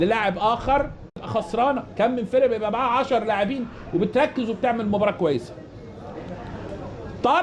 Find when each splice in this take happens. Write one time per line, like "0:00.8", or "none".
0:04.5